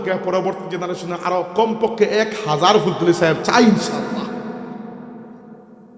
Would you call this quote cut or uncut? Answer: uncut